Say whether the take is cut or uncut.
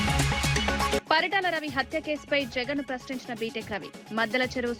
cut